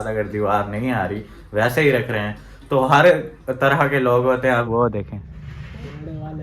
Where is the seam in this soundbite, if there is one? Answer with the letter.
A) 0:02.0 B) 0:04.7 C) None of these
B